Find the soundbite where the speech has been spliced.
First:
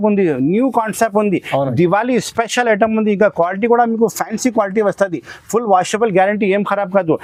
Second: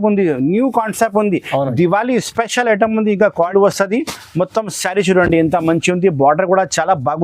second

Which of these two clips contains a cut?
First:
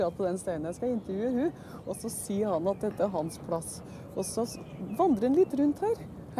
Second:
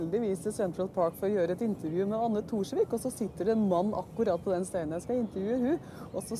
first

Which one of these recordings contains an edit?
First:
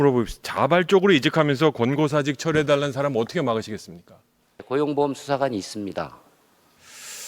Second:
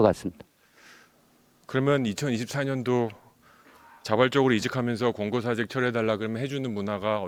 first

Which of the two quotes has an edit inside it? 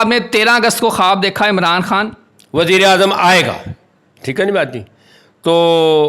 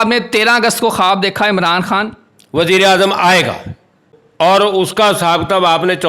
second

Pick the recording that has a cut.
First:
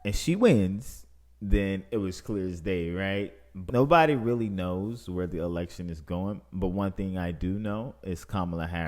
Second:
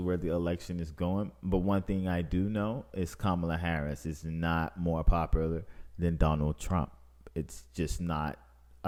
first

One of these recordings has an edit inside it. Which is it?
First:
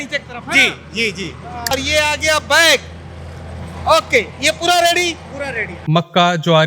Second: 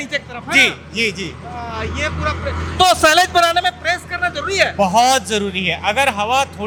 first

